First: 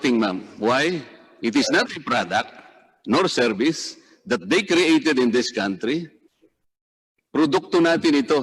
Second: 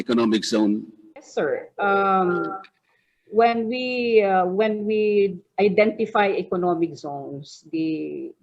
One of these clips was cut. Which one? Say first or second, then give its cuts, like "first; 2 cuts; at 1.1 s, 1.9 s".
second; 1 cut; at 1.3 s